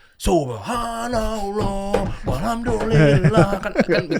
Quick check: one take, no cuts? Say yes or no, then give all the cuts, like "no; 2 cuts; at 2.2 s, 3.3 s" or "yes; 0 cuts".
yes; 0 cuts